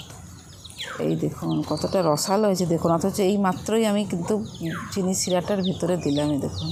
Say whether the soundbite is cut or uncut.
uncut